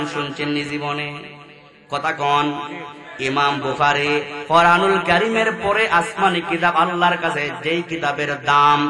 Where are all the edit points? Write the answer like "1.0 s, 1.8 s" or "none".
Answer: none